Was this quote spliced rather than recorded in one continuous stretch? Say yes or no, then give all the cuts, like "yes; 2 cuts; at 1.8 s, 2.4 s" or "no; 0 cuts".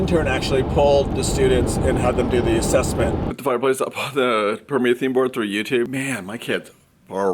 yes; 2 cuts; at 3.3 s, 5.9 s